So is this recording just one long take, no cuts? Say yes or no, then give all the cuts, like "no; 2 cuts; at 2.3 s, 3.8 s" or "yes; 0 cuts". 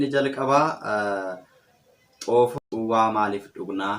no; 1 cut; at 2.6 s